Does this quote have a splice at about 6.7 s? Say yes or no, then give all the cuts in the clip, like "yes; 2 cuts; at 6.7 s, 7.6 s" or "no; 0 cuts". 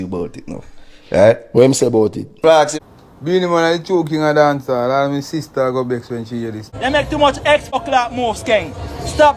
yes; 3 cuts; at 2.8 s, 6.7 s, 7.8 s